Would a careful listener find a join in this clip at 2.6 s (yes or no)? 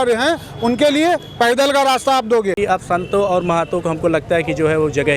yes